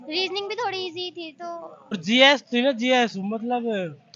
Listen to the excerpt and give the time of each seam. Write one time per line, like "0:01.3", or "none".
0:02.0